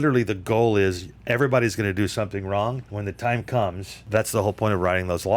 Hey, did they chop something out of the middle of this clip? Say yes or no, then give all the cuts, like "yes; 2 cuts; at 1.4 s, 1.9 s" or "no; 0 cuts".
yes; 2 cuts; at 2.9 s, 3.9 s